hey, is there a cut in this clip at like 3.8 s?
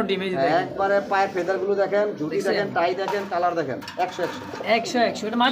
no; 0 cuts

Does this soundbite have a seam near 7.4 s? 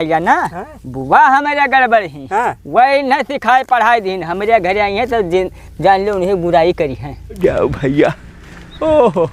yes; 1 cut; at 7.4 s

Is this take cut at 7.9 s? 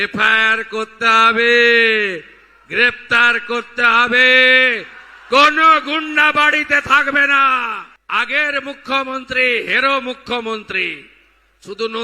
yes; 1 cut; at 7.9 s

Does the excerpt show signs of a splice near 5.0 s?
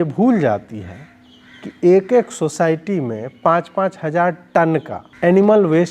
yes; 1 cut; at 5.0 s

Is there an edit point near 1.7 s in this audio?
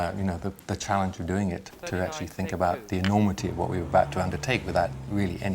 yes; 1 cut; at 1.7 s

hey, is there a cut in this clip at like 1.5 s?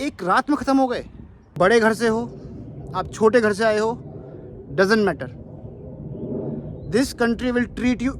yes; 1 cut; at 1.5 s

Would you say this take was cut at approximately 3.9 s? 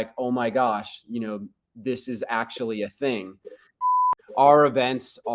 yes; 1 cut; at 3.9 s

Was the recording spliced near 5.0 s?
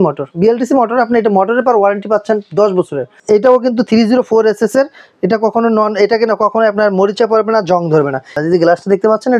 no; 2 cuts; at 3.1 s, 8.4 s

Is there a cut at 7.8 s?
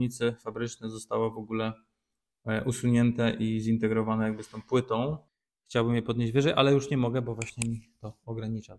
no; 1 cut; at 5.2 s

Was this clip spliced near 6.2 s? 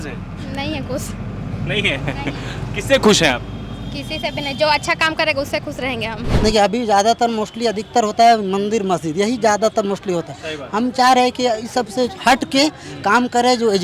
yes; 1 cut; at 6.2 s

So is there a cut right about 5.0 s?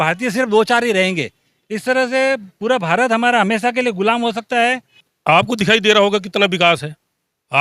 yes; 1 cut; at 5.0 s

